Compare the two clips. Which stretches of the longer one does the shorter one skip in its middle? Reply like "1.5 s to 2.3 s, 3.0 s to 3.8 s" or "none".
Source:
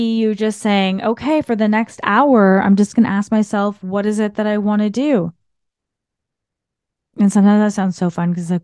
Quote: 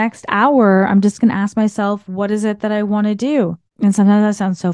5.4 s to 7.0 s